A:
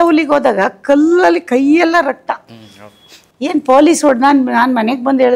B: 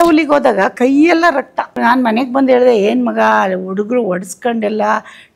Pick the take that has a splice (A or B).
B